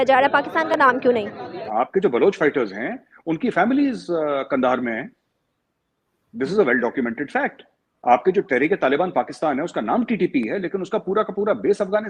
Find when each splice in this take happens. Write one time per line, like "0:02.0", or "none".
0:01.6